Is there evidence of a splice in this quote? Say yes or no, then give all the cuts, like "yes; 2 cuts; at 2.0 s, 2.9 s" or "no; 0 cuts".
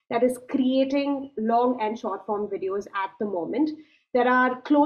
no; 0 cuts